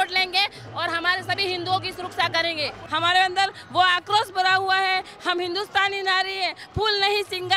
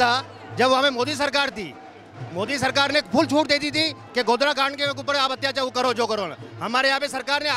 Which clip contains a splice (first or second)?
first